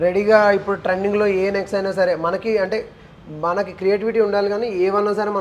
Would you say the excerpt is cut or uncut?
uncut